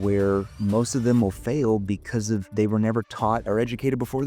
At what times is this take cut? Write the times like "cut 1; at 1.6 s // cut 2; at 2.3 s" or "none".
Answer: cut 1; at 2.5 s